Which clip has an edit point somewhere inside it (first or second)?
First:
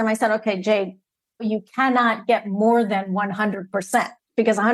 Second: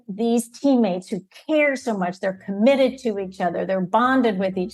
first